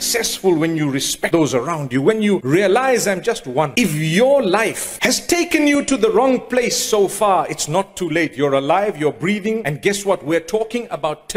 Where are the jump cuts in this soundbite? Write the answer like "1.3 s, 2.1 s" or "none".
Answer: 1.2 s, 2.4 s, 3.7 s, 4.9 s, 9.7 s